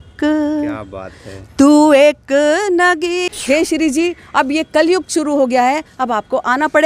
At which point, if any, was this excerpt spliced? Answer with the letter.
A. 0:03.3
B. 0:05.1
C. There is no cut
A